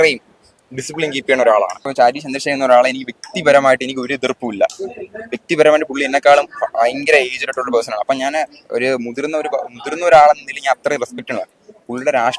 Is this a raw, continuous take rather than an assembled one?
no; 1 cut; at 1.8 s

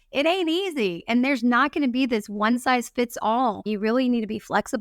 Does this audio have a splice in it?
yes; 1 cut; at 3.7 s

